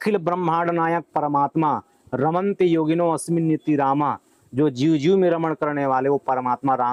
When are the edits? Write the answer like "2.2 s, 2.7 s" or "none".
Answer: none

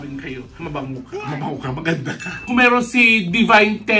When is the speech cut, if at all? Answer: 2.4 s

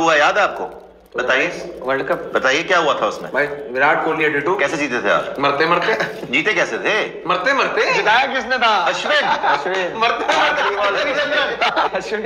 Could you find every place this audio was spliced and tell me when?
none

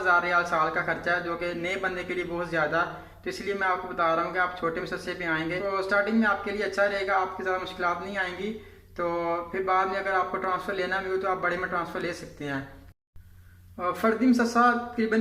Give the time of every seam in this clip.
none

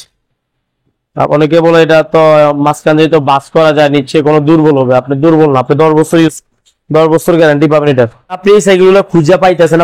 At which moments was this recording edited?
8.4 s

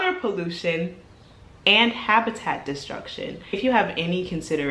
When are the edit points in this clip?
3.4 s

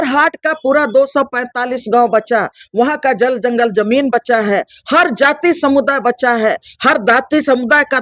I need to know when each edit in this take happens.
none

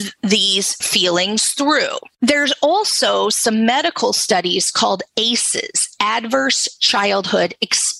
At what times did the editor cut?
none

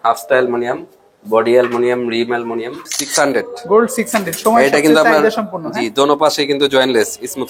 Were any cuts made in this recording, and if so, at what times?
2.9 s

